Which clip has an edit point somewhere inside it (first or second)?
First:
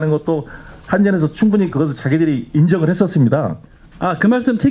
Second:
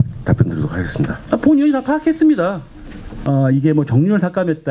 second